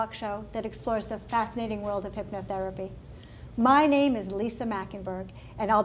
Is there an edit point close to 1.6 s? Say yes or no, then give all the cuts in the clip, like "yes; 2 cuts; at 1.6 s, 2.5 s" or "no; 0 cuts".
yes; 1 cut; at 1.6 s